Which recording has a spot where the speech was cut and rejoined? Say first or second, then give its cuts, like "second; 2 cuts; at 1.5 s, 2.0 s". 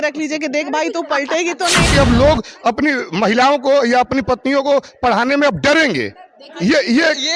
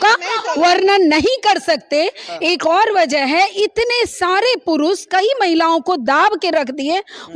first; 1 cut; at 1.9 s